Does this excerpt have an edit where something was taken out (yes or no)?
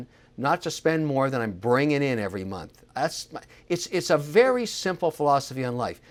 no